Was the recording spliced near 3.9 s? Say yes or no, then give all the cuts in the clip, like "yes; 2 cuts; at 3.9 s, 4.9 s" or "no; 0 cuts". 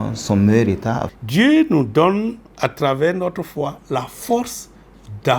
no; 1 cut; at 1.1 s